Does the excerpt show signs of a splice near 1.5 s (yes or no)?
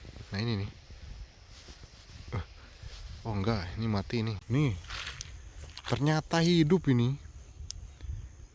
no